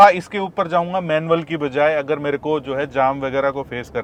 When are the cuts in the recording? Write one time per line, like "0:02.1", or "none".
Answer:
none